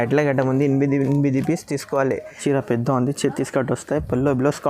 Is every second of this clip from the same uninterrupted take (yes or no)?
no